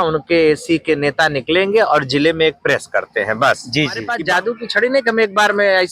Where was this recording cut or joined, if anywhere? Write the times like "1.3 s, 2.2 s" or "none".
4.1 s